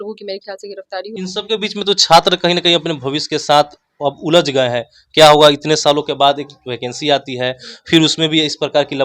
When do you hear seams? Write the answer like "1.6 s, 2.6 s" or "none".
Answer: 1.1 s